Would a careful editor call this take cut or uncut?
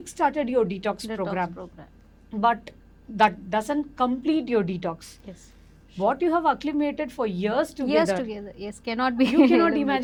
uncut